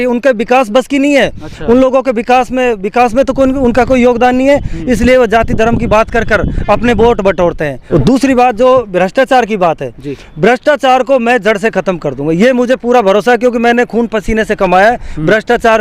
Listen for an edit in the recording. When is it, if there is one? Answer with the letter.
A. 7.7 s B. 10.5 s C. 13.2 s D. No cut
A